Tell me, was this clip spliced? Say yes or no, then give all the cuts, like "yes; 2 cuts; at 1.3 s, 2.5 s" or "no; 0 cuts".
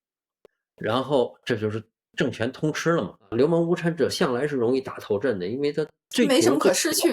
yes; 2 cuts; at 3.2 s, 6.1 s